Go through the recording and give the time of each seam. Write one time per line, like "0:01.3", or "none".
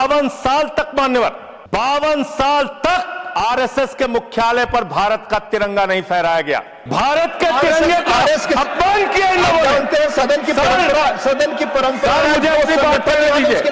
0:01.5
0:03.2
0:06.8